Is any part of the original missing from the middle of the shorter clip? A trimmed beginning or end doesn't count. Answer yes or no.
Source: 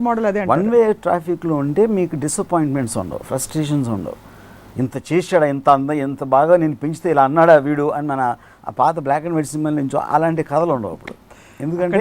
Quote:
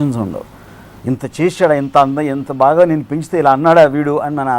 no